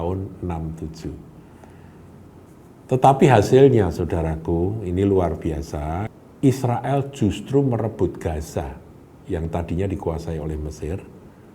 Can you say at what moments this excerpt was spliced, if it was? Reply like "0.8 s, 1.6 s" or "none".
6.1 s